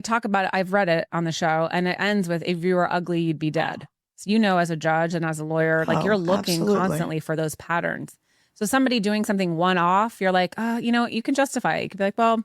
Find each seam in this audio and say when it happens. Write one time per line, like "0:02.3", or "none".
0:04.1